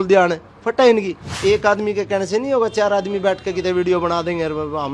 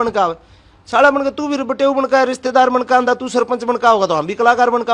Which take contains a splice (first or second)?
first